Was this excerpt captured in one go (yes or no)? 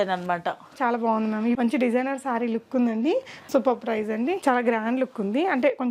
no